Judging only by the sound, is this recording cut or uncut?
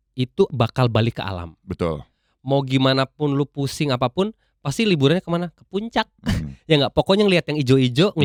uncut